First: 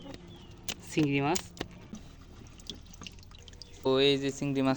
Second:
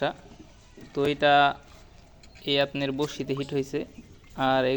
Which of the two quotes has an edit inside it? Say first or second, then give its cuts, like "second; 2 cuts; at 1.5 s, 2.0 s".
first; 2 cuts; at 1.9 s, 3.9 s